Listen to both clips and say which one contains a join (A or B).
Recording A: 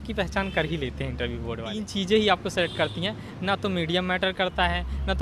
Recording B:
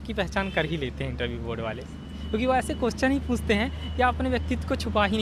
A